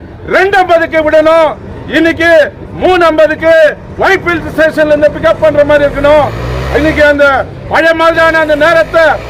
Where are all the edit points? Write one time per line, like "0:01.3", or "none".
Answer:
none